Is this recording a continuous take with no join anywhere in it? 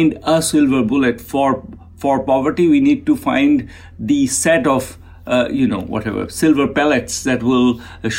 yes; 0 cuts

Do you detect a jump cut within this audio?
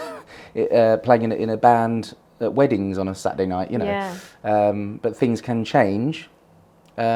no; 0 cuts

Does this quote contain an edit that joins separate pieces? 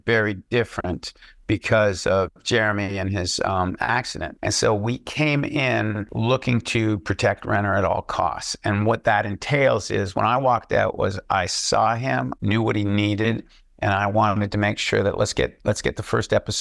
yes; 3 cuts; at 4.2 s, 6.1 s, 12.4 s

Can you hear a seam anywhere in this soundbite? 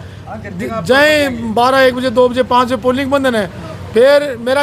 no; 0 cuts

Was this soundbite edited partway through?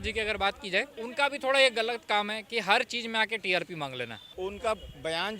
yes; 2 cuts; at 1.0 s, 4.2 s

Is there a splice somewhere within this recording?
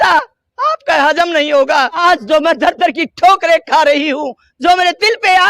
yes; 1 cut; at 2.0 s

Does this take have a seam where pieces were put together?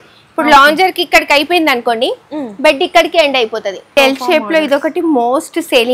yes; 1 cut; at 3.9 s

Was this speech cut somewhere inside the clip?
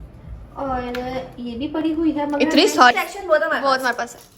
yes; 1 cut; at 2.9 s

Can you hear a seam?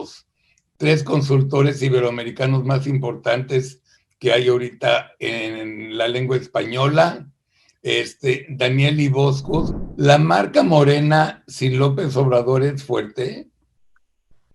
yes; 1 cut; at 9.7 s

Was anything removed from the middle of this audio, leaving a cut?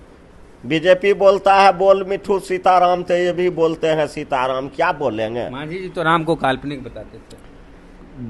no; 0 cuts

